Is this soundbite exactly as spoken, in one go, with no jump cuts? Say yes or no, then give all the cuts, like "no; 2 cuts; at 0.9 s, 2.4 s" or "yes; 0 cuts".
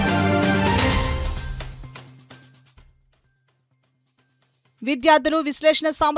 yes; 0 cuts